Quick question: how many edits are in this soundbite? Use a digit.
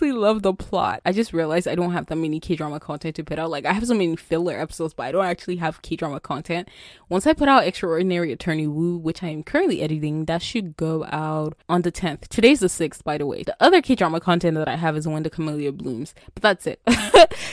3